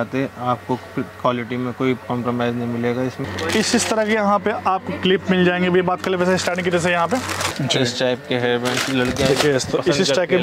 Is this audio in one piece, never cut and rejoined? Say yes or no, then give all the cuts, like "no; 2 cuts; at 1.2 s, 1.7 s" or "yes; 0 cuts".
no; 2 cuts; at 3.3 s, 7.5 s